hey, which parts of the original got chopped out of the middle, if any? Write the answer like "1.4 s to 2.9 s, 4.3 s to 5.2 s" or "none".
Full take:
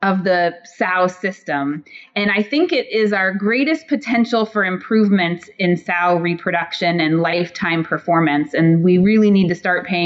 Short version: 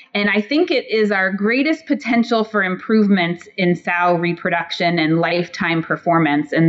none